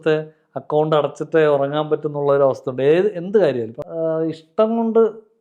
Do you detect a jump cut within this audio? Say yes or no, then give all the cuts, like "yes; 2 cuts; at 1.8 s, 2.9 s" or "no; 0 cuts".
yes; 1 cut; at 3.8 s